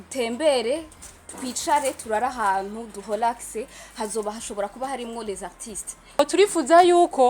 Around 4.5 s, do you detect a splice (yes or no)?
no